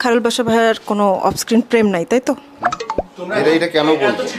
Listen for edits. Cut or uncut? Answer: uncut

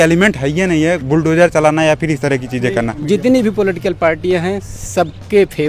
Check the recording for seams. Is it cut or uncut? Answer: cut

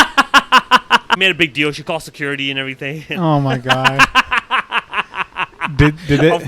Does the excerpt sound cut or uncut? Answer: cut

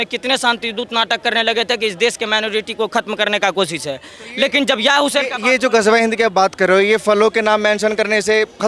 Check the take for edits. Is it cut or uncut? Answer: uncut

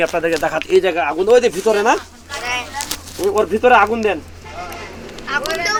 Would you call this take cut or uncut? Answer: uncut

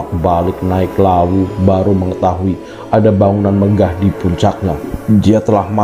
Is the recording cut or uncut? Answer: cut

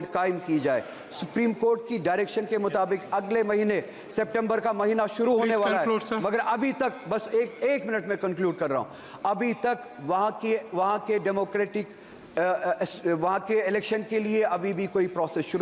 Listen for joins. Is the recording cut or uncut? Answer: uncut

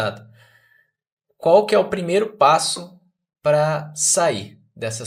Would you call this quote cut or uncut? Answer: uncut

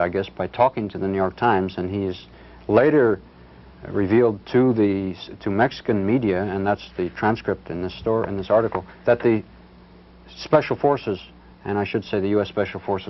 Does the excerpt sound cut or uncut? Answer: uncut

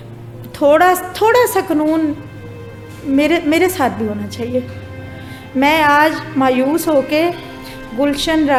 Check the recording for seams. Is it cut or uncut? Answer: uncut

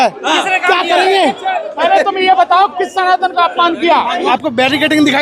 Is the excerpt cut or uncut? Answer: cut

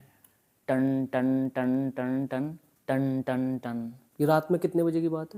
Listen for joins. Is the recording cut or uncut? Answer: uncut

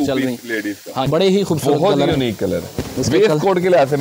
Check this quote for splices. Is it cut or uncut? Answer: cut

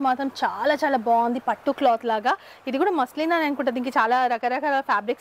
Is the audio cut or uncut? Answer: uncut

